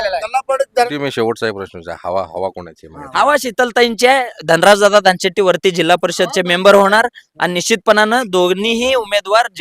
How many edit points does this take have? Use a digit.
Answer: 1